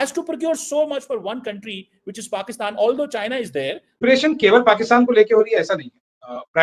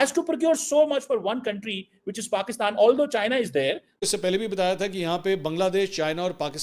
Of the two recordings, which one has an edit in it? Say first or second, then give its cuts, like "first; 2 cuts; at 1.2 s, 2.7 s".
second; 1 cut; at 4.0 s